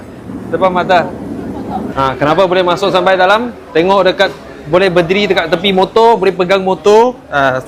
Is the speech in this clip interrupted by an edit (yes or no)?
no